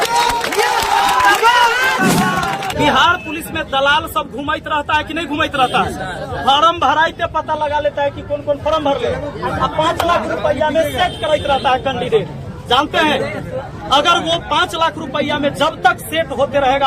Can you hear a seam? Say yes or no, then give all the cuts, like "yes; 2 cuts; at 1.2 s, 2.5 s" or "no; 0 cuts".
yes; 1 cut; at 2.7 s